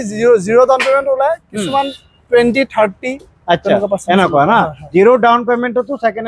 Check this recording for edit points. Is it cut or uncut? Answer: uncut